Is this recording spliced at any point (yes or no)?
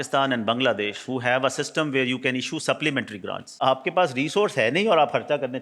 yes